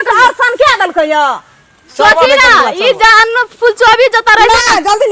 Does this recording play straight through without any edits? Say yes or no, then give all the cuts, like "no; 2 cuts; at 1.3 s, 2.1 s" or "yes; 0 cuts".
yes; 0 cuts